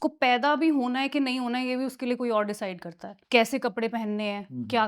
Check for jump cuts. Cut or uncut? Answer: cut